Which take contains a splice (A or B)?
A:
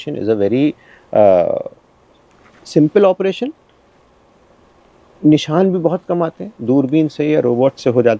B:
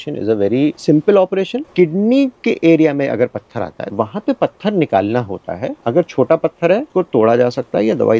B